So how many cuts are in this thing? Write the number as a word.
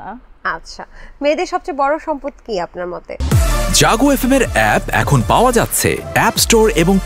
one